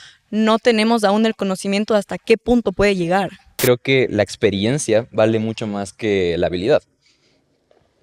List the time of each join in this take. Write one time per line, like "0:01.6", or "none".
0:03.6